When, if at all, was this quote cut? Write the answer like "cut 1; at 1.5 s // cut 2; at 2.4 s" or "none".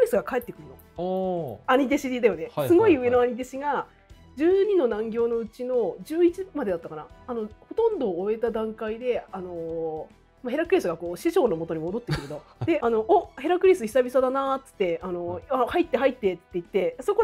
none